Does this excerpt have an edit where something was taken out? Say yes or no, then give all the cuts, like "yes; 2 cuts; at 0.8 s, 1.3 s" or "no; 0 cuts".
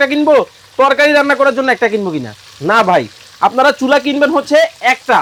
no; 0 cuts